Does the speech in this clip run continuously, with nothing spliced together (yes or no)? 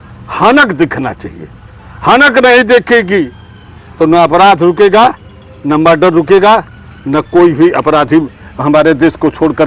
yes